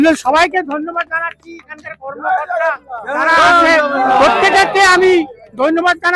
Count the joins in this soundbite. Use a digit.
0